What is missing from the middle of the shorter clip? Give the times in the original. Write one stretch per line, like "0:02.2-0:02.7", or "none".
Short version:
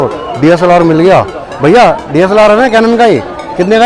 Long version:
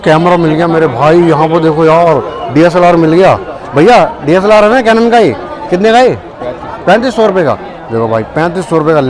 none